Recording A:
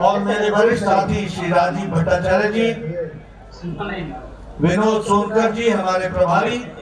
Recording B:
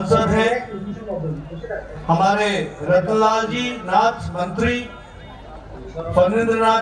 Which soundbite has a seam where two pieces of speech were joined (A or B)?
B